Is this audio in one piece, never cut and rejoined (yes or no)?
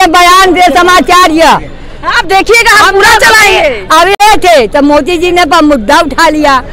no